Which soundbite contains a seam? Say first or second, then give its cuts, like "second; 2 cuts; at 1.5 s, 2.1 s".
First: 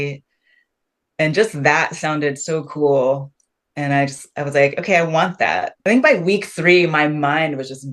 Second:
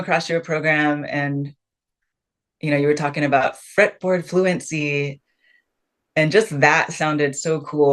first; 1 cut; at 5.7 s